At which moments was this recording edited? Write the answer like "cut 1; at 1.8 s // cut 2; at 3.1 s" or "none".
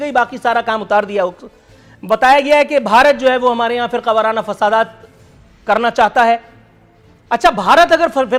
none